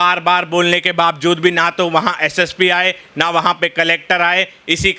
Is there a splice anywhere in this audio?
no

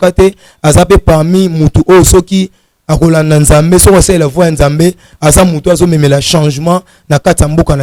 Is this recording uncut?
yes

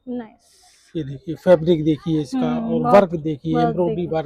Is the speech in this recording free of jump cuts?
yes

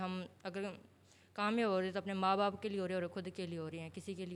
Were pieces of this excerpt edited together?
no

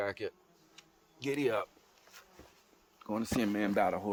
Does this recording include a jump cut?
no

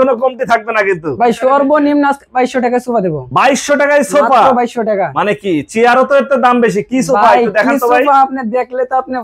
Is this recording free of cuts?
no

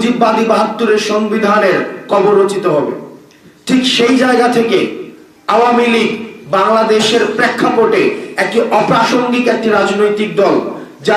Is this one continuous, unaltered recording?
yes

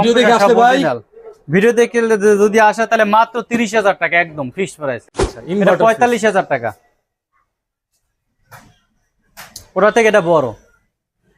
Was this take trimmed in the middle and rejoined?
yes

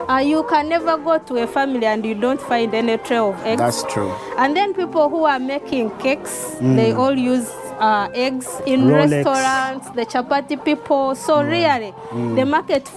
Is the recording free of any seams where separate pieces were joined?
yes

